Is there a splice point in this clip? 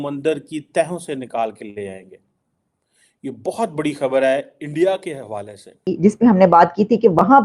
yes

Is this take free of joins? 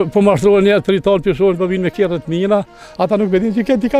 yes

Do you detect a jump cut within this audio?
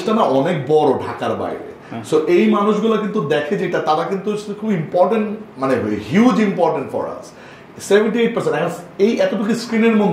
no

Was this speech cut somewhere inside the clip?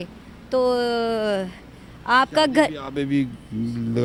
no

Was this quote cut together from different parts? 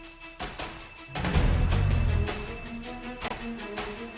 no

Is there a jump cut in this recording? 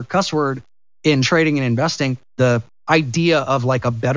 yes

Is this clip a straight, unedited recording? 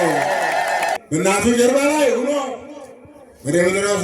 no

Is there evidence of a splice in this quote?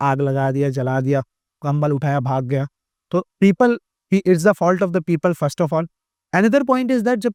no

